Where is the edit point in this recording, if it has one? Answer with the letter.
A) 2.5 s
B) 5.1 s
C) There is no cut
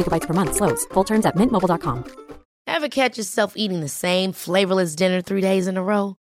A